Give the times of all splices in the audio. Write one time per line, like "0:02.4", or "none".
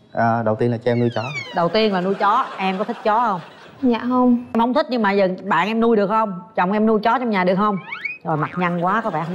0:04.5